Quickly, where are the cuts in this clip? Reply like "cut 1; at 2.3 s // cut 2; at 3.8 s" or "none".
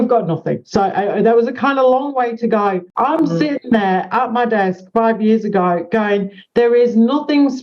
cut 1; at 2.9 s